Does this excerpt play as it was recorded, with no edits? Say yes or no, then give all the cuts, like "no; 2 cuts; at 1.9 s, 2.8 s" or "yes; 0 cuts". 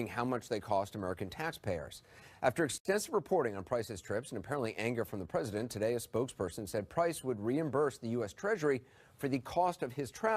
no; 1 cut; at 3.2 s